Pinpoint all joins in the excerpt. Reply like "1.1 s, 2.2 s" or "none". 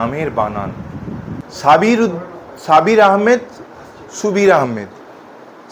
none